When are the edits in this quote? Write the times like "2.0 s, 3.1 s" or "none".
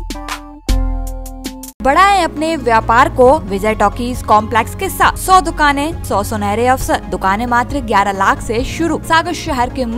1.8 s, 3.5 s, 5.2 s, 6.0 s, 7.1 s, 9.0 s

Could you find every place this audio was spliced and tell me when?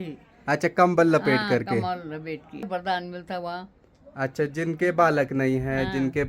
2.7 s

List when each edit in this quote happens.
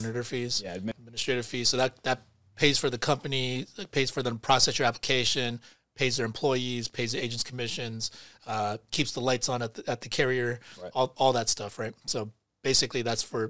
0.9 s

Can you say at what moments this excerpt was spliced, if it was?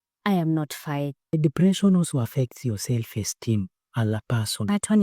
1.3 s

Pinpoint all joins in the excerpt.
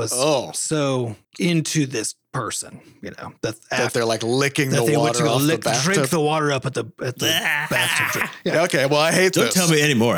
8.5 s

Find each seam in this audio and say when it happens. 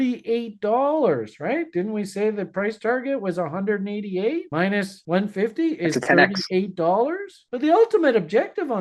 5.0 s, 7.3 s

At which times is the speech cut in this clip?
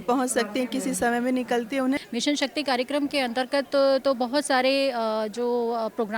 2.0 s

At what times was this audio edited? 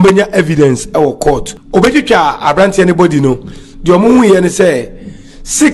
1.5 s

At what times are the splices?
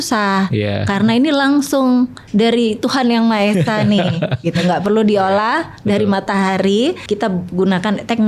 7.0 s

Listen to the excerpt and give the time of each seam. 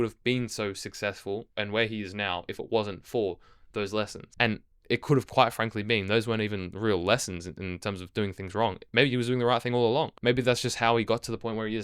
1.5 s, 4.2 s, 10.1 s

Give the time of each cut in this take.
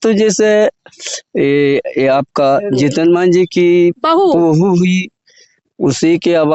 none

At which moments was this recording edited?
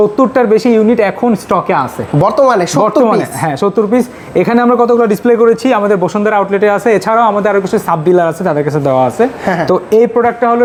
none

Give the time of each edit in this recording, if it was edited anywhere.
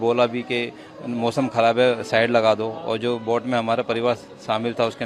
none

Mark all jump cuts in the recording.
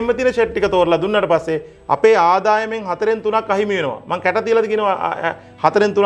none

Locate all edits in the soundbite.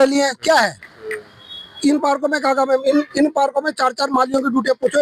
none

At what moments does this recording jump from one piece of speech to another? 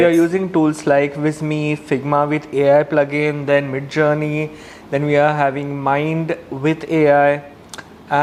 none

